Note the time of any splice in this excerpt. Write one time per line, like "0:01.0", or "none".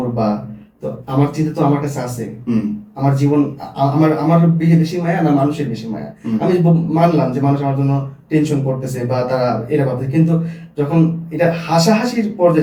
none